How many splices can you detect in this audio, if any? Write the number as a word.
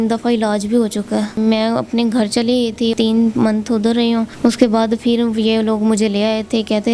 three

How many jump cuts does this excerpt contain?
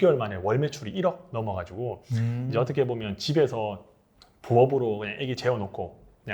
zero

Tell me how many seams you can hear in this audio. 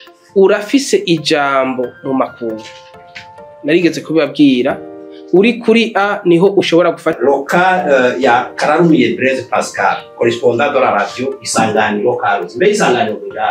one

